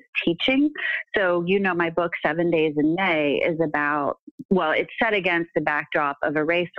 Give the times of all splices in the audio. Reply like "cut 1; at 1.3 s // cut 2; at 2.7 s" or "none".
cut 1; at 4.4 s